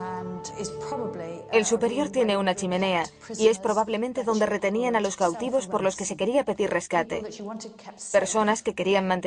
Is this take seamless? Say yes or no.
yes